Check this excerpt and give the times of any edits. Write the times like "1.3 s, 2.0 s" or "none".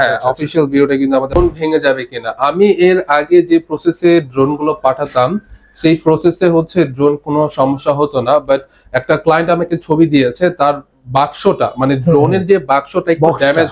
1.3 s